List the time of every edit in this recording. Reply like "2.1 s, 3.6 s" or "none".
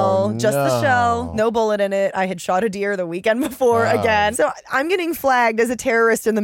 1.3 s, 4.3 s